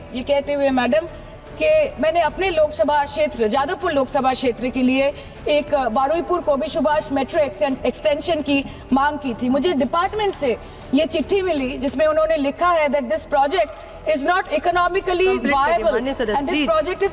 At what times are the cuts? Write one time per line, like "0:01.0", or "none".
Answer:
none